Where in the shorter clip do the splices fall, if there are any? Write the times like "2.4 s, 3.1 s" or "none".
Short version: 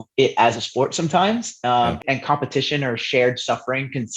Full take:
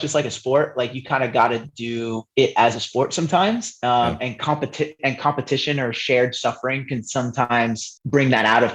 2.0 s